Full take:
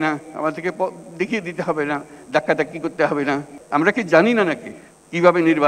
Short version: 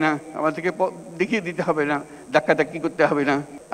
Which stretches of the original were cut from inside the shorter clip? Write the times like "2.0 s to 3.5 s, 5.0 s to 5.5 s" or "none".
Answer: none